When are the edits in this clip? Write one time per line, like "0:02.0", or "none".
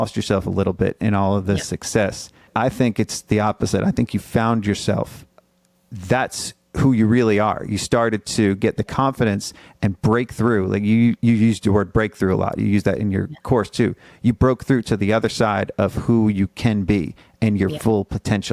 0:02.5
0:05.4